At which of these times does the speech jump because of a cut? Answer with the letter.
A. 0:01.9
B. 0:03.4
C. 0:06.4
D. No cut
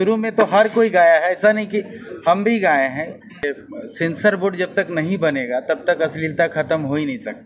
B